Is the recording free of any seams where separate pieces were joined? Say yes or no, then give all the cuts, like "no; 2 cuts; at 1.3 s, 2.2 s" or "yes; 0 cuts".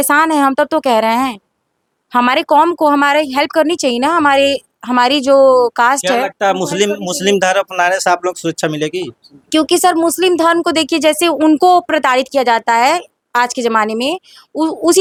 yes; 0 cuts